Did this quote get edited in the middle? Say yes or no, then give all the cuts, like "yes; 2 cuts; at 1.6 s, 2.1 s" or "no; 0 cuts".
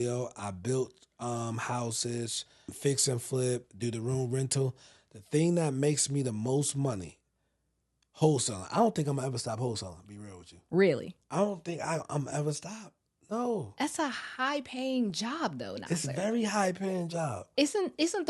yes; 2 cuts; at 2.7 s, 3.7 s